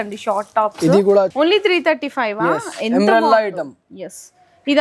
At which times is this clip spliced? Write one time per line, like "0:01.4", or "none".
0:01.3